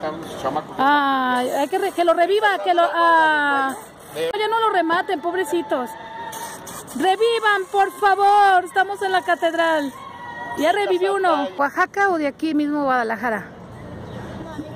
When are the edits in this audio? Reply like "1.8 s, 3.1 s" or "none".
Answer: 4.3 s, 11.6 s